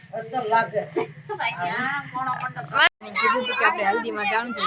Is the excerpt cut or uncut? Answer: cut